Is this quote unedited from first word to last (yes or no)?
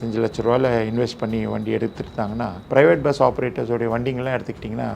no